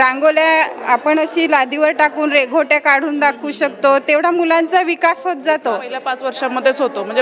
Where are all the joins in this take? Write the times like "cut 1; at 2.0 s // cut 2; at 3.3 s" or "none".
cut 1; at 6.1 s